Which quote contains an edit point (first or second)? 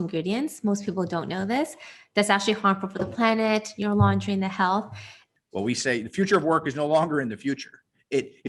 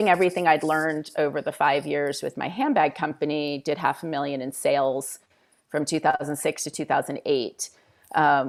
first